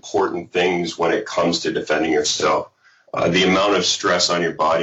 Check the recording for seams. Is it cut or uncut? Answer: uncut